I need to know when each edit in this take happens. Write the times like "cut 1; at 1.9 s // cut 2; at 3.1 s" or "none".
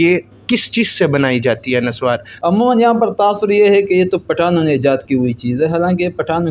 cut 1; at 2.3 s